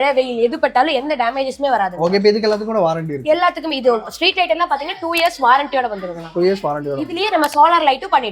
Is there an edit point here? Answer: no; 0 cuts

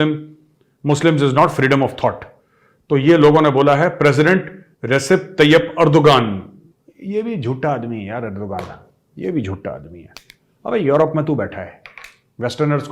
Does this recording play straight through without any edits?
yes; 0 cuts

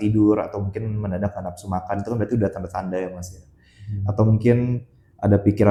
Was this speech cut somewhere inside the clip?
no; 0 cuts

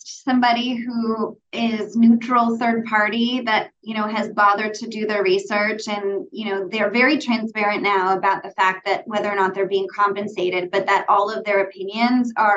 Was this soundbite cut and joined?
no; 0 cuts

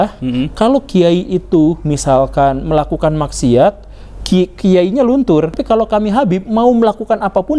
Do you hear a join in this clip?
yes; 1 cut; at 5.6 s

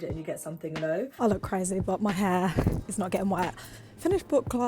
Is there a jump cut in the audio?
yes; 1 cut; at 1.1 s

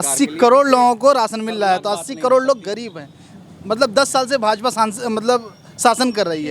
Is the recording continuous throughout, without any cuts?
yes; 0 cuts

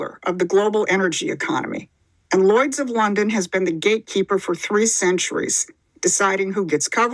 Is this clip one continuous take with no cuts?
yes; 0 cuts

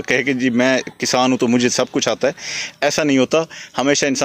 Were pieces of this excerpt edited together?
no; 0 cuts

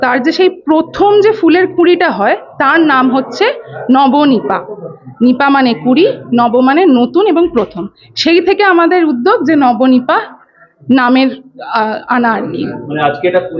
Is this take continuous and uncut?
yes; 0 cuts

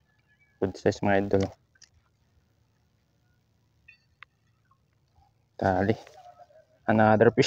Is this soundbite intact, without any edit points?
yes; 0 cuts

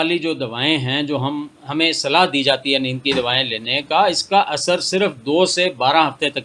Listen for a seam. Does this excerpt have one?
no; 0 cuts

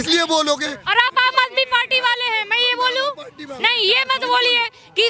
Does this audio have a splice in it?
no; 0 cuts

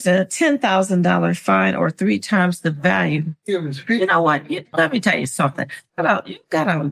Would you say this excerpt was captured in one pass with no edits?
yes; 0 cuts

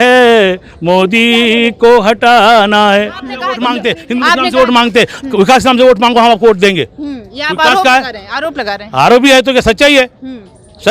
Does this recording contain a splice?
yes; 1 cut; at 3.5 s

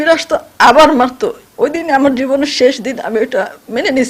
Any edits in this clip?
yes; 1 cut; at 1.4 s

